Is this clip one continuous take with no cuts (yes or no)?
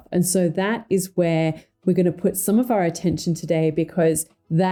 yes